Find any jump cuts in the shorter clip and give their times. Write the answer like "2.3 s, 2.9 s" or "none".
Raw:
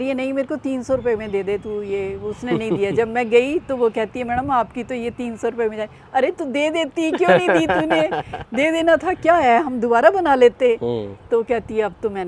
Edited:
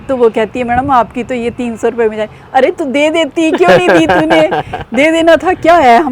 none